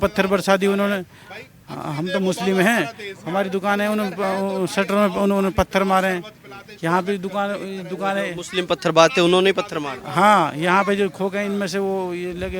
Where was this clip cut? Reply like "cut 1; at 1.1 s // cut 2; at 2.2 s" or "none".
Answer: none